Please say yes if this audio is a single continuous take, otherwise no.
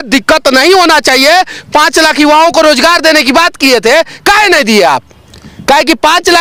yes